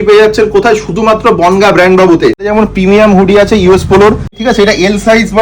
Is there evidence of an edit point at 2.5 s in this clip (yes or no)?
yes